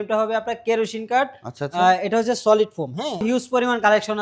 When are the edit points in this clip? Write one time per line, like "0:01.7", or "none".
0:03.2